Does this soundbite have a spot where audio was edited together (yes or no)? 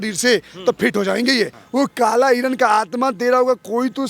yes